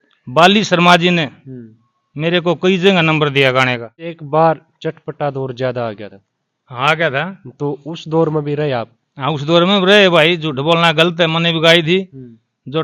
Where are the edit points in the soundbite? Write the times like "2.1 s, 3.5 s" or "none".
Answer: 4.2 s